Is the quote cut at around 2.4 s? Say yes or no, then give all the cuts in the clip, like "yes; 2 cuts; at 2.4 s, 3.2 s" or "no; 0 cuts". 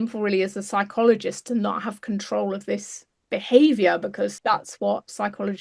no; 1 cut; at 4.2 s